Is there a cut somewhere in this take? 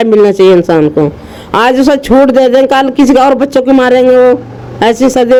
no; 0 cuts

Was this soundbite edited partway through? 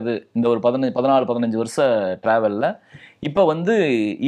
no; 0 cuts

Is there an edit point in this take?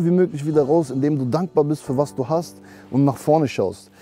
no; 0 cuts

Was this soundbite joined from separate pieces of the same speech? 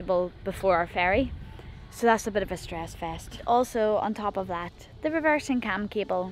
no; 0 cuts

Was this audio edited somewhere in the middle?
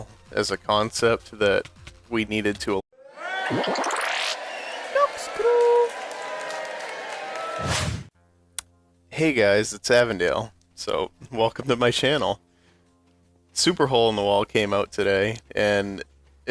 no; 0 cuts

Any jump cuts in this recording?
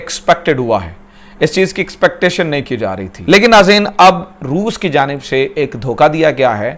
yes; 1 cut; at 3.2 s

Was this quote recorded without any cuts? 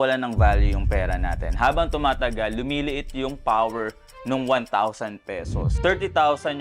no; 1 cut; at 5.7 s

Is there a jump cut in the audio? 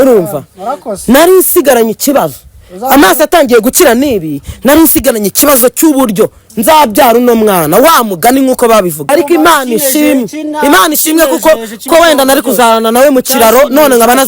yes; 1 cut; at 9.0 s

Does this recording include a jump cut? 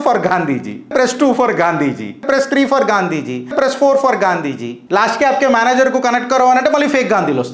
yes; 4 cuts; at 0.9 s, 2.2 s, 3.5 s, 4.7 s

